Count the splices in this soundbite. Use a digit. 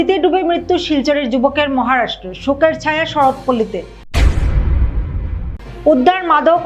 0